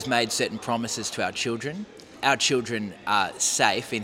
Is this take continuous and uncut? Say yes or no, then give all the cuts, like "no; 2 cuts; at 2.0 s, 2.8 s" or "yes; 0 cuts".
no; 1 cut; at 2.1 s